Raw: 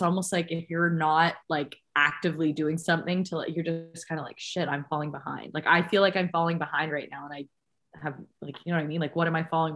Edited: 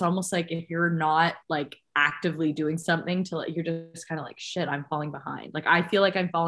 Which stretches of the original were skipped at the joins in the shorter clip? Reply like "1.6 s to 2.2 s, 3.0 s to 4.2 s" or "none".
none